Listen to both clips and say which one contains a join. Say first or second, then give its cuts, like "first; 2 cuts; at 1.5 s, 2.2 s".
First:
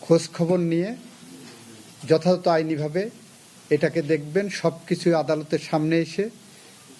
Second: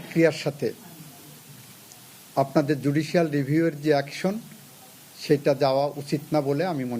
first; 1 cut; at 4.5 s